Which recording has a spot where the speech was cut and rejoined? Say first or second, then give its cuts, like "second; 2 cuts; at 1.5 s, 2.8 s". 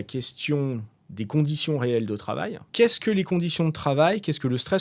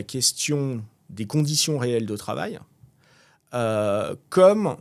first; 1 cut; at 2.7 s